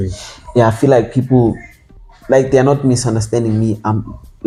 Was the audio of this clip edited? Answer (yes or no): no